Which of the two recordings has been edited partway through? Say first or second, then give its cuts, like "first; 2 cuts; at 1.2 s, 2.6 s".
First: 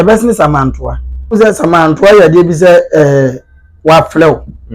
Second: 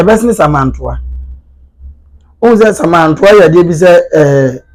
first; 1 cut; at 1.3 s